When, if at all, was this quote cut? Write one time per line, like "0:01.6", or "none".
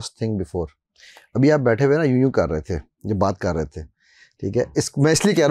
none